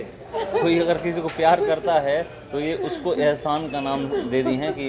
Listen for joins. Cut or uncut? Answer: uncut